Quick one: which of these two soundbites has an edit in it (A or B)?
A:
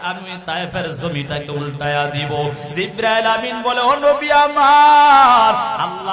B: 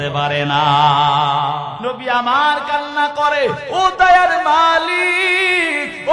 B